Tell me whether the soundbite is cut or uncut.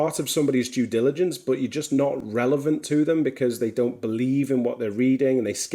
uncut